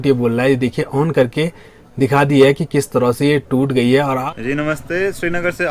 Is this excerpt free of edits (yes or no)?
no